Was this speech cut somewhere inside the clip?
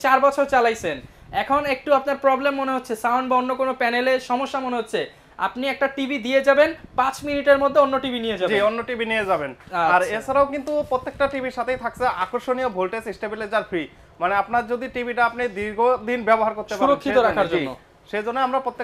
no; 0 cuts

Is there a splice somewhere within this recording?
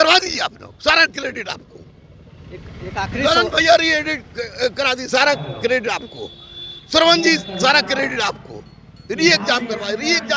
no; 0 cuts

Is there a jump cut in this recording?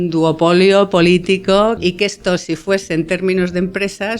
yes; 1 cut; at 1.8 s

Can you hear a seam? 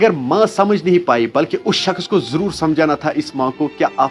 no; 0 cuts

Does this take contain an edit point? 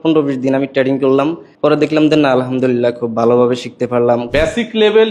yes; 2 cuts; at 1.4 s, 4.3 s

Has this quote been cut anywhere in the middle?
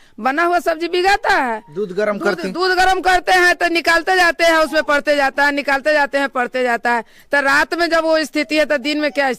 no; 0 cuts

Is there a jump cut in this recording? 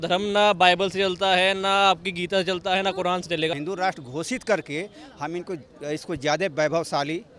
yes; 1 cut; at 3.5 s

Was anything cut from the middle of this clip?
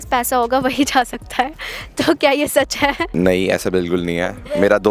no; 0 cuts

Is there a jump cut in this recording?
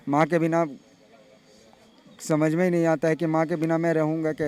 no; 0 cuts

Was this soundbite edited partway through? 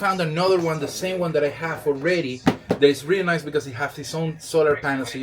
no; 0 cuts

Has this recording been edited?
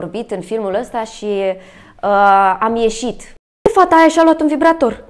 yes; 1 cut; at 3.7 s

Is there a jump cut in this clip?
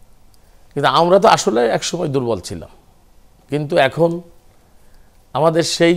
no; 0 cuts

